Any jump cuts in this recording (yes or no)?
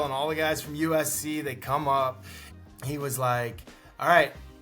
yes